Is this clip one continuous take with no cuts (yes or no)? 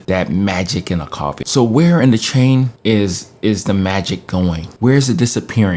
no